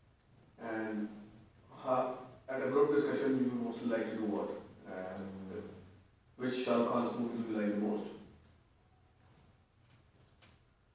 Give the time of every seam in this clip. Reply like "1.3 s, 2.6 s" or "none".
8.2 s